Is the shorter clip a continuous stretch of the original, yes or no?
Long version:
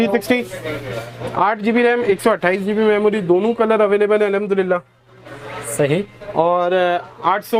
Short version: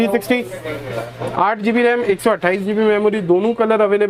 yes